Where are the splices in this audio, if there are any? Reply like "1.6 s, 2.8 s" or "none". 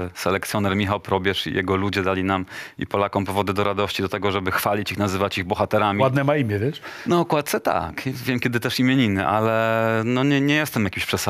none